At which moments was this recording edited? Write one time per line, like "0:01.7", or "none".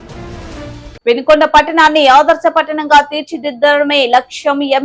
none